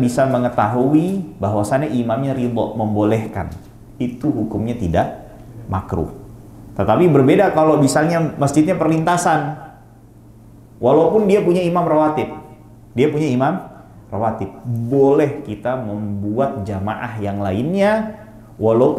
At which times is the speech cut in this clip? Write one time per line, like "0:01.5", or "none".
none